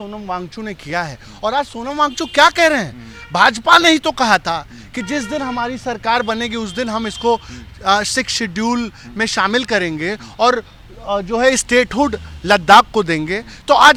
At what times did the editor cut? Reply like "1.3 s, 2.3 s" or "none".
none